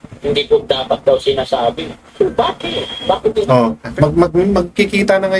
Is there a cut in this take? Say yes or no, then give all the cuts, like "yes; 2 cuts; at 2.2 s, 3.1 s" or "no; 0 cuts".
yes; 1 cut; at 3.9 s